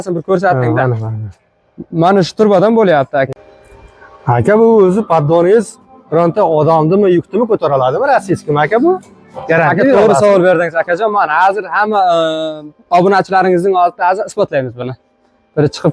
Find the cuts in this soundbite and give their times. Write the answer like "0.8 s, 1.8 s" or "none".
none